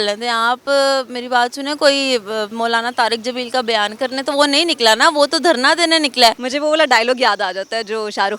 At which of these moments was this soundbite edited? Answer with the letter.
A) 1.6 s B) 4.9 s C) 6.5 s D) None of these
C